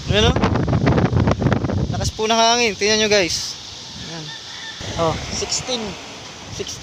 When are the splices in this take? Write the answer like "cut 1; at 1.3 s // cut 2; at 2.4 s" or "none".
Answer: cut 1; at 4.8 s